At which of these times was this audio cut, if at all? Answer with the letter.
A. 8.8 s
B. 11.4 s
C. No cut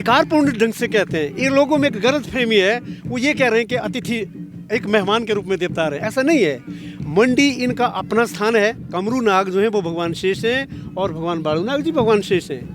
A